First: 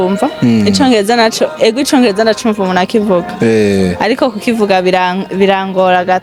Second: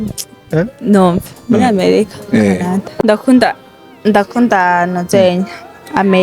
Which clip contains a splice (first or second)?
second